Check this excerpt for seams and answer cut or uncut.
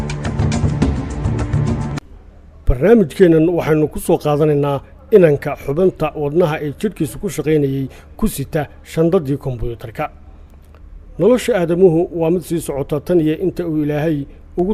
cut